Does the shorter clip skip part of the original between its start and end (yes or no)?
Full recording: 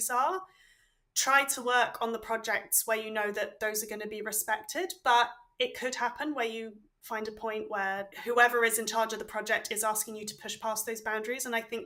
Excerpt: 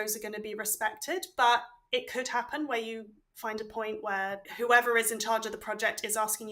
no